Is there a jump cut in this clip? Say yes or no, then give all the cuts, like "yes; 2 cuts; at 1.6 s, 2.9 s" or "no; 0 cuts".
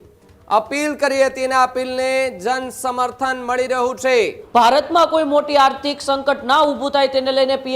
yes; 1 cut; at 4.4 s